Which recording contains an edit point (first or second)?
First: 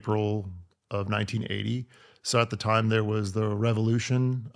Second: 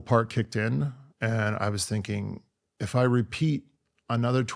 second